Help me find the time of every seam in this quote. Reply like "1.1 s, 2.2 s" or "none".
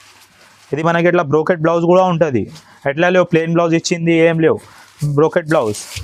none